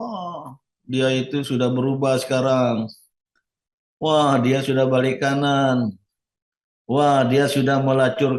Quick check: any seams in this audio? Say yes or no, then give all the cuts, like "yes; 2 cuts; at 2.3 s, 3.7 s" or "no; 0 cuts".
no; 0 cuts